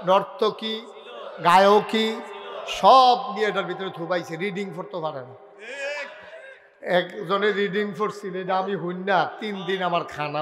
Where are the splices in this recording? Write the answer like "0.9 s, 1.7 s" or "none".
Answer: none